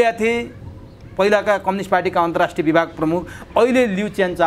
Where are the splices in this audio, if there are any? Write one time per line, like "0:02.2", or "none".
none